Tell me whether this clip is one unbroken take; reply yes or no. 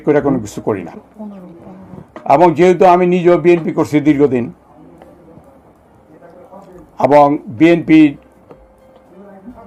yes